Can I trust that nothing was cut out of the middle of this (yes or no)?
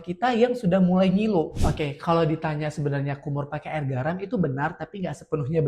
no